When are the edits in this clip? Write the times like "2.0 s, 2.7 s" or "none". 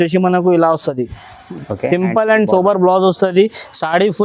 none